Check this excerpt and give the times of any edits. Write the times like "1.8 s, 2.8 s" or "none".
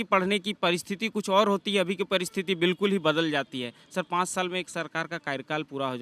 none